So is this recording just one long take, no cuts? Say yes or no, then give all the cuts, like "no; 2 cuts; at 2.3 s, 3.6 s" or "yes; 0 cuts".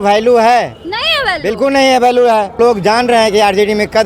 yes; 0 cuts